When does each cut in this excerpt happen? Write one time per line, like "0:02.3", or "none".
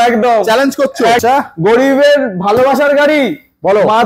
0:01.2